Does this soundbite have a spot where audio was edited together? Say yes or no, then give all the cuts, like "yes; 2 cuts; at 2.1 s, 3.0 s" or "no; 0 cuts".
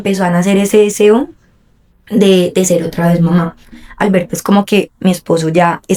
no; 0 cuts